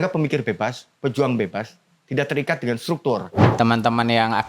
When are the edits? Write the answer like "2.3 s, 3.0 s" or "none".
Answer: 3.4 s